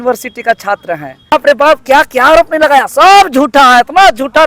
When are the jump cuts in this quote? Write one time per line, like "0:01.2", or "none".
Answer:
0:01.3